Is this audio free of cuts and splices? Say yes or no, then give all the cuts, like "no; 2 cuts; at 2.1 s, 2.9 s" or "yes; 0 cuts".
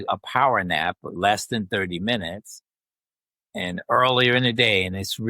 no; 1 cut; at 1.1 s